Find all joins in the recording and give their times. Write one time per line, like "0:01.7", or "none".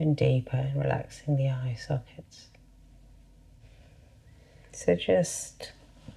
0:03.6